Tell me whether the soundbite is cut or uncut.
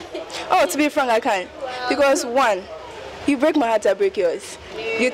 uncut